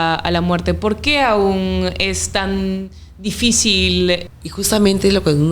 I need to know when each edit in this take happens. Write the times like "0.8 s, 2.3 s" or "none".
4.2 s